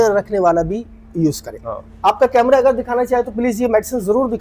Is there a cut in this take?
no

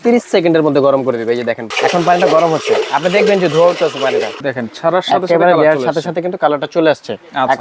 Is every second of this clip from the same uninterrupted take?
no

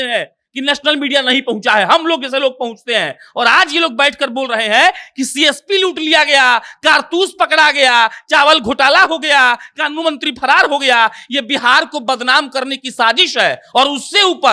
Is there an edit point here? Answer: no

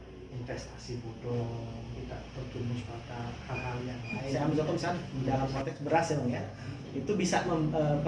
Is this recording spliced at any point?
yes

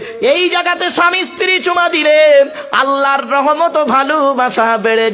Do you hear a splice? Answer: no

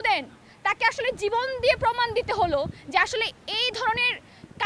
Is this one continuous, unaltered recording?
yes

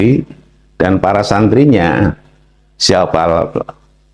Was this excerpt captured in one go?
yes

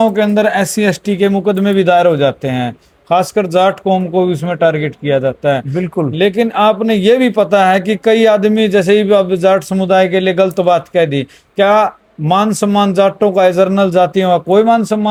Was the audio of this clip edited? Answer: no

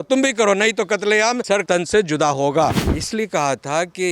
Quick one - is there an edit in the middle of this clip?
yes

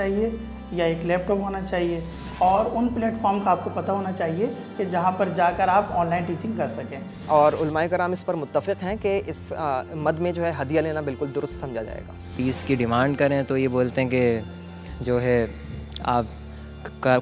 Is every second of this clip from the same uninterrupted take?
no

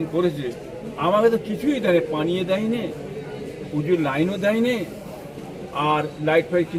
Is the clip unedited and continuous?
yes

